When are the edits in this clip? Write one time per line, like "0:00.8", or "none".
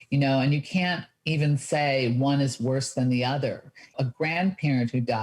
0:03.9